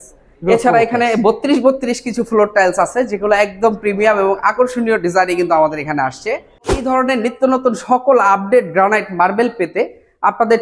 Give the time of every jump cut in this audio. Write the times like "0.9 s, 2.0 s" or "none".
6.8 s